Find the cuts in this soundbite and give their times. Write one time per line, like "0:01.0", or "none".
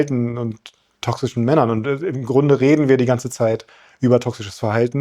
none

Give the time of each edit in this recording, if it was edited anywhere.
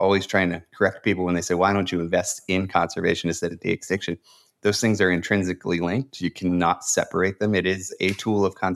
none

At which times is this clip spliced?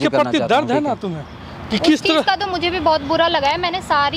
none

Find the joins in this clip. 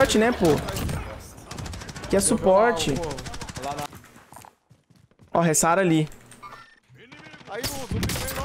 0:03.9

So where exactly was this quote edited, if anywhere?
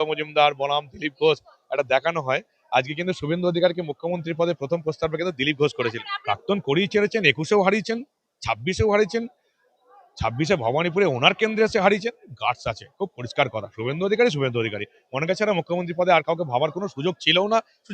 0:06.1

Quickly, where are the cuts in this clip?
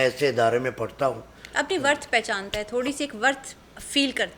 none

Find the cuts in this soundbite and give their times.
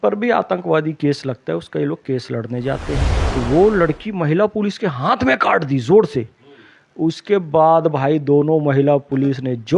0:03.1

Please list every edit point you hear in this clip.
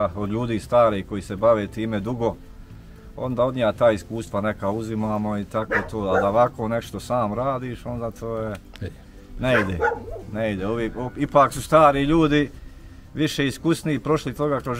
none

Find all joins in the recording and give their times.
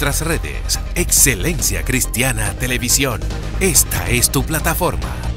none

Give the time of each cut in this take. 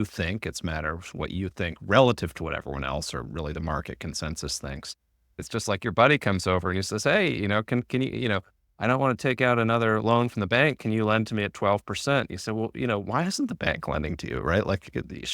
0:05.4

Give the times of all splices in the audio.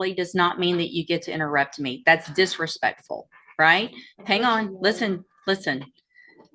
none

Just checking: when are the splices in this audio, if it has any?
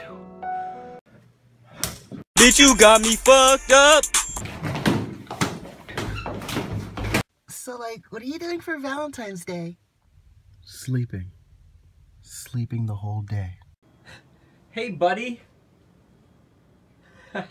none

